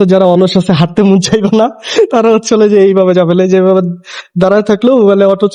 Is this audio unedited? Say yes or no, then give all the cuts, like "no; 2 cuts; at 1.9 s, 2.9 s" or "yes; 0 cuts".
yes; 0 cuts